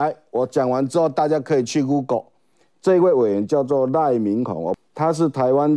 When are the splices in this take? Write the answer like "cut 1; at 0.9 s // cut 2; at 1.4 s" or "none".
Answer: cut 1; at 4.8 s